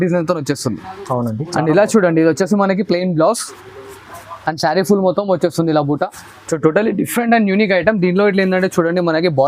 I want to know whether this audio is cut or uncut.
uncut